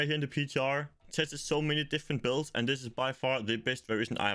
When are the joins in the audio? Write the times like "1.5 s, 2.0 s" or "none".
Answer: 1.0 s

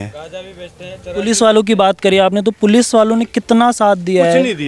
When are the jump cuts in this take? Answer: none

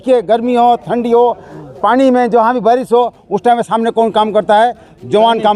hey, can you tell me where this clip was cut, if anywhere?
none

